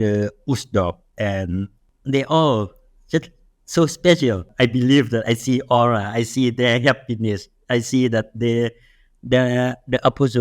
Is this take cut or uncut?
cut